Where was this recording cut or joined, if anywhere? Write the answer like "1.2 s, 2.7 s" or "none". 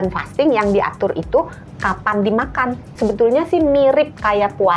2.9 s